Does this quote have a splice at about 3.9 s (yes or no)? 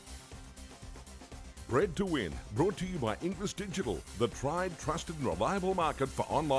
no